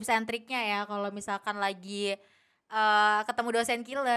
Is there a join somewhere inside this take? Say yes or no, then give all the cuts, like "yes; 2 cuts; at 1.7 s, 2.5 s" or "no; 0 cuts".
no; 0 cuts